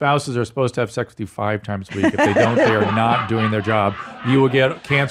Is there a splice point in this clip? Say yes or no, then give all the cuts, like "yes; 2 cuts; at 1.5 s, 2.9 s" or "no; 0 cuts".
no; 0 cuts